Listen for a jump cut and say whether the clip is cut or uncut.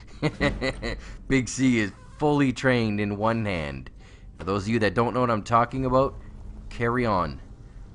uncut